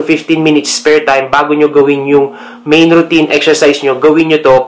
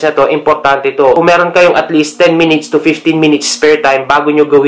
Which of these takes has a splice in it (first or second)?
second